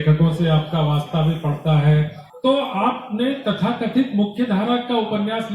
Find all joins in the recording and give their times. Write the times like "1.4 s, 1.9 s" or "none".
2.2 s